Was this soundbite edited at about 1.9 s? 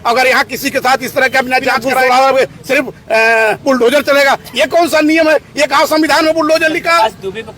yes; 1 cut; at 1.9 s

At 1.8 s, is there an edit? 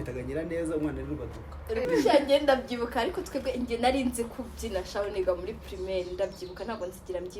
yes; 1 cut; at 1.8 s

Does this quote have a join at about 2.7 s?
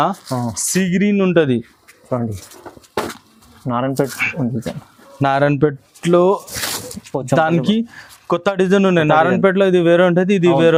no; 0 cuts

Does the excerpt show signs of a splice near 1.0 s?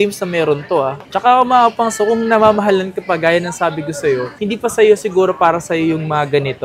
yes; 1 cut; at 1.0 s

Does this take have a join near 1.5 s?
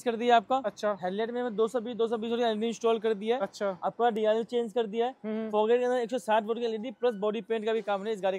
no; 0 cuts

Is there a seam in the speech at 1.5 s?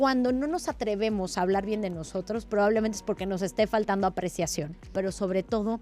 no; 1 cut; at 4.9 s

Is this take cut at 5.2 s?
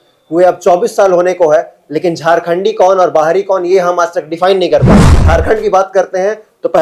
yes; 1 cut; at 5.2 s

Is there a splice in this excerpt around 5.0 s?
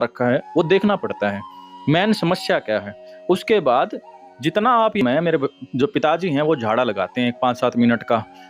yes; 1 cut; at 5.0 s

